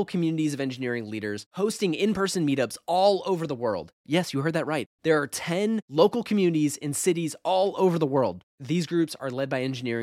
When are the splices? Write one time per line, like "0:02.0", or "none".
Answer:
none